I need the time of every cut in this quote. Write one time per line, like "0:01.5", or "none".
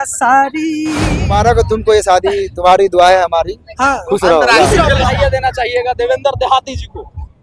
0:01.2
0:05.1